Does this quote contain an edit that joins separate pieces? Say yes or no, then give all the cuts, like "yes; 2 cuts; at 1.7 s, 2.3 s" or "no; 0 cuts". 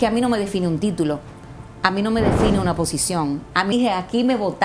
yes; 1 cut; at 3.7 s